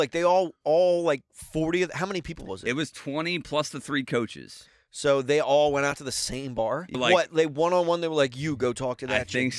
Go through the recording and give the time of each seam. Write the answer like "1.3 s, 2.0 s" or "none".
7.0 s